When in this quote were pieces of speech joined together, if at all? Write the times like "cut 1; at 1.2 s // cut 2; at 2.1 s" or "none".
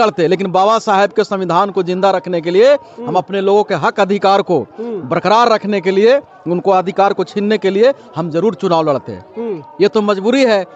none

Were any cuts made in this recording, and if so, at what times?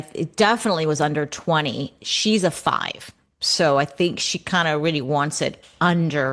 none

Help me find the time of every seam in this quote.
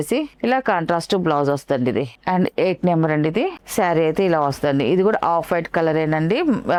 none

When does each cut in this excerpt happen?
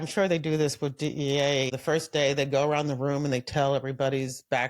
cut 1; at 1.8 s

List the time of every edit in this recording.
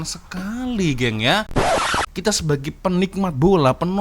cut 1; at 1.9 s

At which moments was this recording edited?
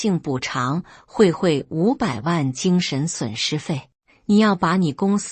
cut 1; at 4.0 s

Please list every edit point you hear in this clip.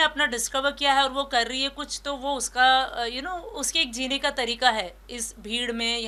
none

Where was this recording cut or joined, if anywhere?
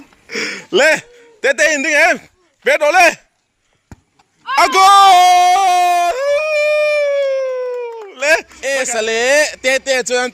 cut 1; at 8.6 s

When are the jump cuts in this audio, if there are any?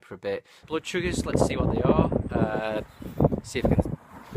cut 1; at 3.4 s

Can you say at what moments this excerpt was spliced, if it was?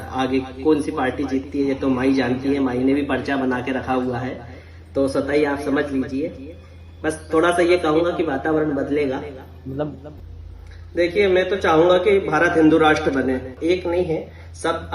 cut 1; at 10.1 s // cut 2; at 13.5 s

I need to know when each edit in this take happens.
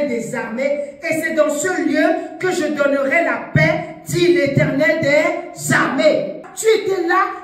cut 1; at 6.5 s

